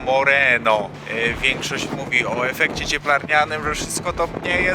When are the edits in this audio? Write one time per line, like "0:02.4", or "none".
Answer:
0:01.0